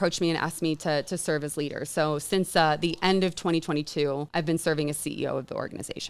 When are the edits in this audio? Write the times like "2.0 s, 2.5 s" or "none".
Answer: 4.3 s